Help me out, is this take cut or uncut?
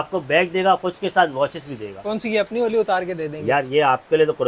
uncut